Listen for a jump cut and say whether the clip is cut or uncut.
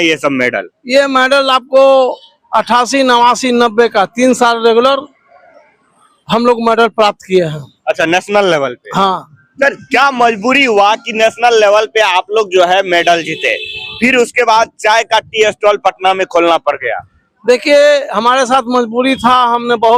uncut